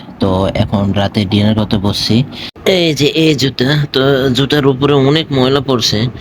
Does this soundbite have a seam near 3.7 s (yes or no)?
no